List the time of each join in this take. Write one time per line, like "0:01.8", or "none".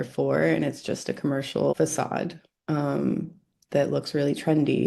0:01.7